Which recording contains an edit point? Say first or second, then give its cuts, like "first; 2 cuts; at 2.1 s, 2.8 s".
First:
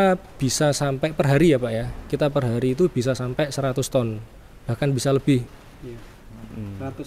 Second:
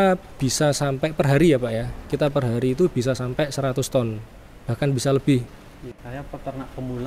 second; 1 cut; at 6.0 s